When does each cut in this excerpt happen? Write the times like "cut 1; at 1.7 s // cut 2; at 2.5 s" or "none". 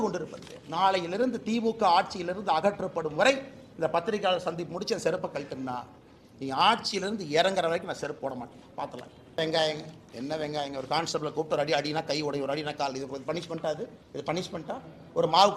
cut 1; at 9.4 s